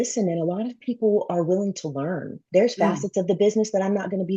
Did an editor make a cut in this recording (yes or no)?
yes